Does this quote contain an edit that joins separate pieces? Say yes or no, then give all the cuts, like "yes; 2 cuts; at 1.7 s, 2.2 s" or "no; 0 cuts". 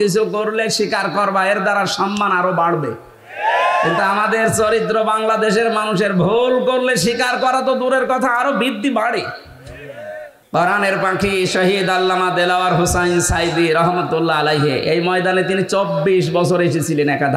yes; 1 cut; at 10.2 s